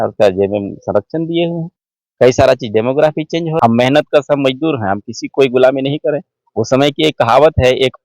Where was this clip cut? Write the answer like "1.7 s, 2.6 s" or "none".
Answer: 3.5 s